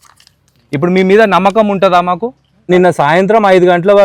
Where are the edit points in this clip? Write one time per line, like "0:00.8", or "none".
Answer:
0:02.5